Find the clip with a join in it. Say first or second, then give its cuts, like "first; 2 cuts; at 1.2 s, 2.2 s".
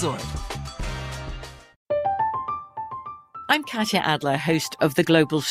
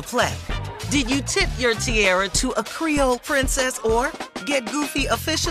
first; 1 cut; at 1.7 s